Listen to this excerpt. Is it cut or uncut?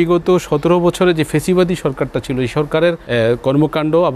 cut